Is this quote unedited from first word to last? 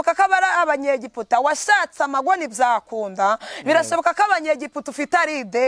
yes; 0 cuts

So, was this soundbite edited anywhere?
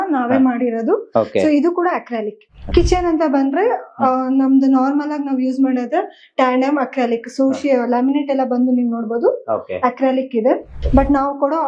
yes; 2 cuts; at 2.6 s, 10.7 s

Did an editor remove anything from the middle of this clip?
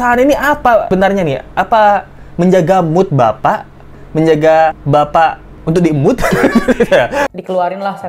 yes; 2 cuts; at 0.9 s, 7.3 s

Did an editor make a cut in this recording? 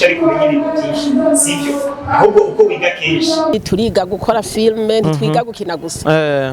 yes; 1 cut; at 3.5 s

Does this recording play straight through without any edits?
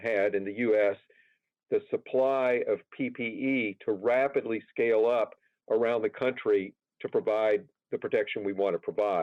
yes; 0 cuts

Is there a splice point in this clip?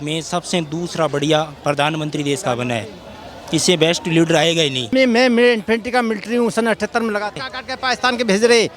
yes; 2 cuts; at 4.9 s, 7.3 s

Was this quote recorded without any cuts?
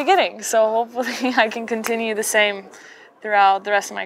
yes; 0 cuts

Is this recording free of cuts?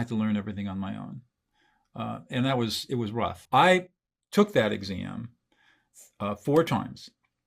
no; 1 cut; at 3.4 s

